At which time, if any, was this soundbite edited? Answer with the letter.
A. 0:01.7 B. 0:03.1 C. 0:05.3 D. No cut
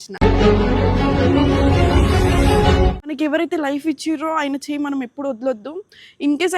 B